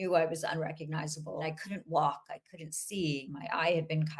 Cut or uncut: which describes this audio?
cut